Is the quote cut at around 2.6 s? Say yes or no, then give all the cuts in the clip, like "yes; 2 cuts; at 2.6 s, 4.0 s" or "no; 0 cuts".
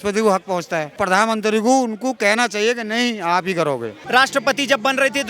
no; 2 cuts; at 1.0 s, 4.0 s